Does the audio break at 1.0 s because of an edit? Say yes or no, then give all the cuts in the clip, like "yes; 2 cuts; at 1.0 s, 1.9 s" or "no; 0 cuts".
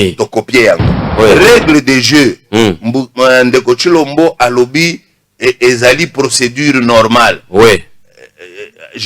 yes; 1 cut; at 1.0 s